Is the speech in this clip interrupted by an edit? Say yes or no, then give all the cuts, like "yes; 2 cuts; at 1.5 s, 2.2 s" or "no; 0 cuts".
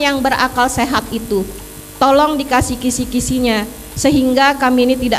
no; 0 cuts